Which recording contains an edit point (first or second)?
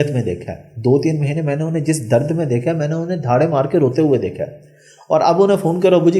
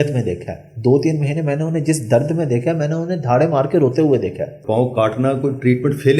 second